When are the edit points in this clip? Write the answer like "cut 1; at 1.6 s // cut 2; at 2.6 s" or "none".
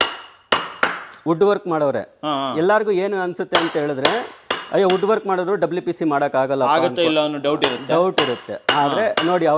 none